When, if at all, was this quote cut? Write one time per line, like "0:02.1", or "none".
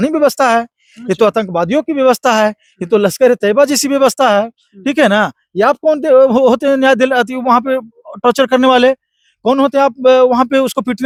none

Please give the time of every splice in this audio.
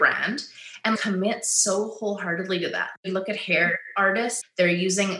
0:03.0
0:04.4

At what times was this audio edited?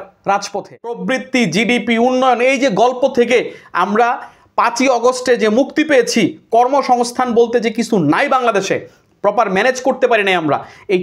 0:01.0

